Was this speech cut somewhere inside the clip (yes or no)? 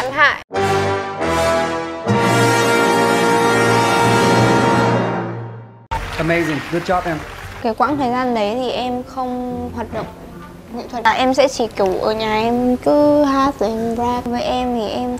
yes